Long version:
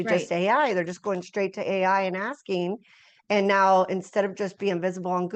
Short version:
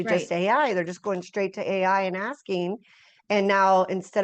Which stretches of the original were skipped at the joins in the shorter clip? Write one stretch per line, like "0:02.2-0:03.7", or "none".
none